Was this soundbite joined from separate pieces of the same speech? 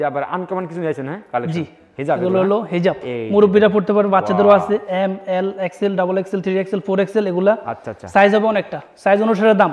no; 0 cuts

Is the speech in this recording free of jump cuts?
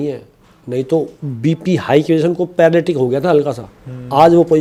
yes; 0 cuts

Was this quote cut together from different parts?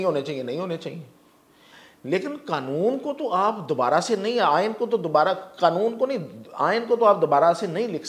no; 0 cuts

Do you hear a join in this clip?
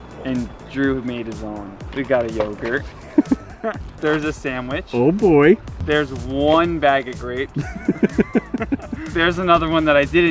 yes; 4 cuts; at 1.8 s, 3.9 s, 5.7 s, 9.0 s

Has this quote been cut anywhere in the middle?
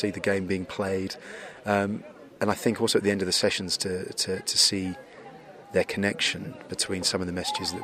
no; 0 cuts

